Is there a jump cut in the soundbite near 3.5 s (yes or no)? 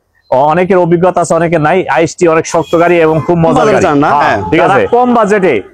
yes